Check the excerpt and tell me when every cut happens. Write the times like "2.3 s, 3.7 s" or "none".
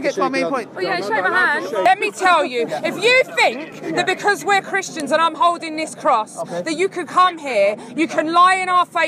1.8 s